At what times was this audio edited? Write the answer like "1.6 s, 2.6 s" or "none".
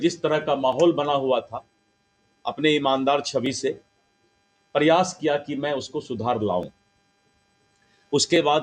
none